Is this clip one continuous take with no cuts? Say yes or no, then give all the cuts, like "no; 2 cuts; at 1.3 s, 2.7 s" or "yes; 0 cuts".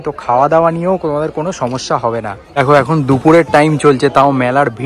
no; 1 cut; at 2.5 s